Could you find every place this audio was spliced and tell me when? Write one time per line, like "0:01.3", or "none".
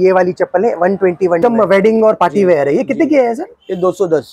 0:01.4